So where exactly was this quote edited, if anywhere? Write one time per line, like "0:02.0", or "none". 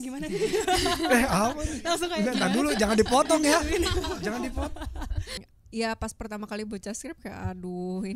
0:05.4

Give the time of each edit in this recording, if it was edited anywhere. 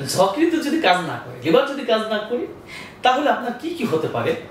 none

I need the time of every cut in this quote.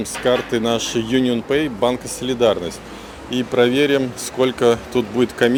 none

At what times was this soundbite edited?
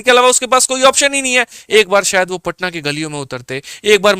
0:01.6

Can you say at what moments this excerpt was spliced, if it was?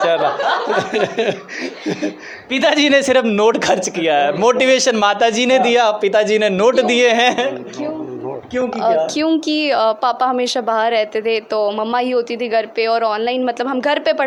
none

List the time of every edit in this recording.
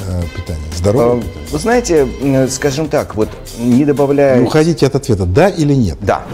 none

